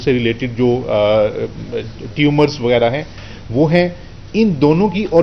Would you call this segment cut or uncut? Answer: uncut